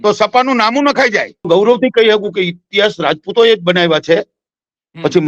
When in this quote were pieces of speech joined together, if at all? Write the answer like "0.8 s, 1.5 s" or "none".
1.4 s